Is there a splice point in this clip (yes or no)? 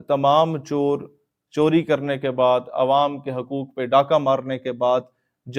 no